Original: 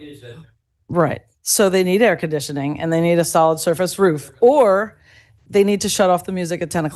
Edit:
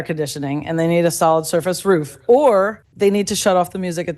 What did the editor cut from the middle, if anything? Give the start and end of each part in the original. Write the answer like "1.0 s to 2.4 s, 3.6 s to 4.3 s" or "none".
5.0 s to 5.4 s